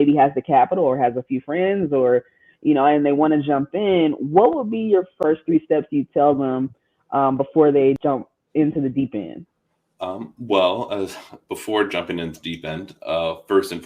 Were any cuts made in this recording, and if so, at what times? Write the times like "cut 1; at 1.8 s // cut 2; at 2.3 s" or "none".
cut 1; at 5.2 s // cut 2; at 8.0 s